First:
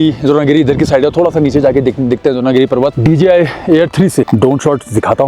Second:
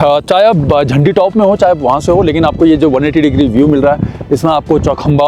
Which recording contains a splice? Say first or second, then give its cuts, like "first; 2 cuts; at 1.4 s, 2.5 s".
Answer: first; 2 cuts; at 3.0 s, 4.3 s